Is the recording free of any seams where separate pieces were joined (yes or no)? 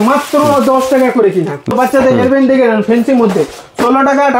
no